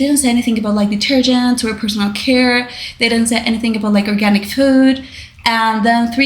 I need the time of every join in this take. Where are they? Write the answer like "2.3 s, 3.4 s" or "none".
none

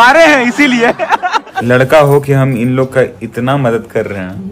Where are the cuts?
1.5 s

